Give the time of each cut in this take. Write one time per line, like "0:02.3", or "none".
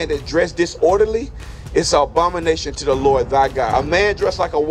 0:03.7